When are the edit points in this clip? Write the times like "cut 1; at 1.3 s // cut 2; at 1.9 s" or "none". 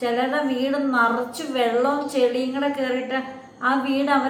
none